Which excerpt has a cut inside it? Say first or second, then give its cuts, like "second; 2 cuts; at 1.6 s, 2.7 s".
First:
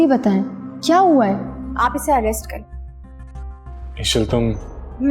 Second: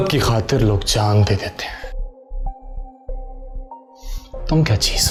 first; 1 cut; at 1.6 s